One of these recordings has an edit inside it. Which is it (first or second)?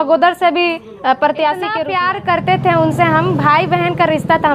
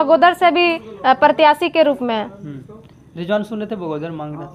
first